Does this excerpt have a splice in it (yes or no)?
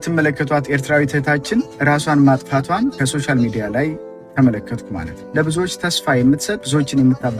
yes